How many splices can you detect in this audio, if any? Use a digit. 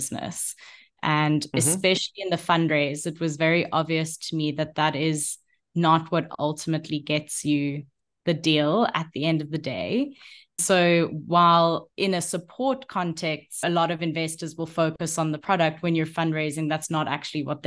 3